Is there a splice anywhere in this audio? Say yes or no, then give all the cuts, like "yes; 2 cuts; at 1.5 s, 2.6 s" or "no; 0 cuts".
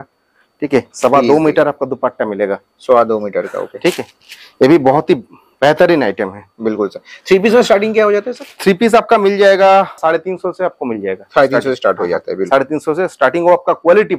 no; 0 cuts